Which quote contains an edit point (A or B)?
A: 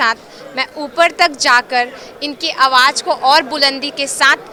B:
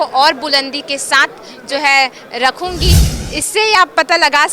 B